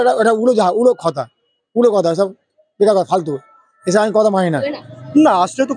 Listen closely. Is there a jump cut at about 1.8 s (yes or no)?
no